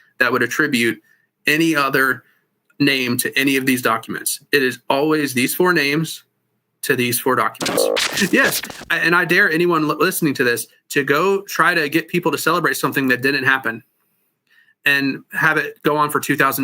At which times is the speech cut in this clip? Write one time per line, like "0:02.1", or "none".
0:08.1